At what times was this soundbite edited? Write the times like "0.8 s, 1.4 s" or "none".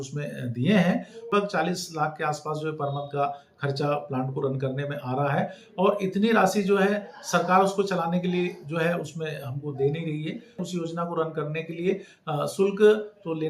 1.3 s, 10.6 s